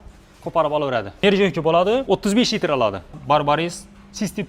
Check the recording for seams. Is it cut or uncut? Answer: cut